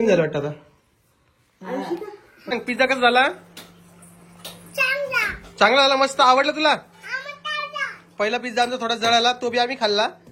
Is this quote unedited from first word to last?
no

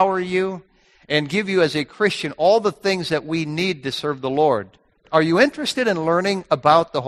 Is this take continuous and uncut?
no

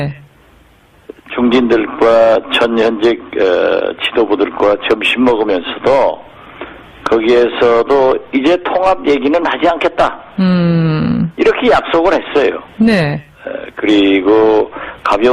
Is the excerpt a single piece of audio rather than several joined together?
yes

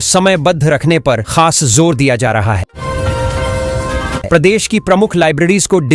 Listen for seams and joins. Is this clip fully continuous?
no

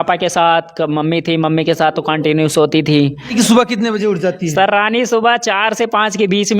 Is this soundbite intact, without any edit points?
no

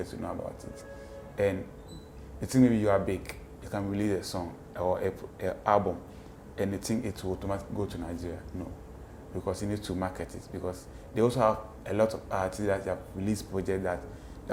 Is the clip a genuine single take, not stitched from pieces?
yes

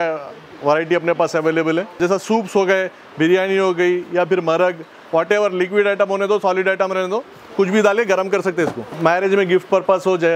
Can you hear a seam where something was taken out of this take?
yes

